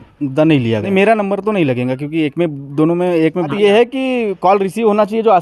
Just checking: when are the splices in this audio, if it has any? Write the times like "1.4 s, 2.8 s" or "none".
0.9 s, 3.5 s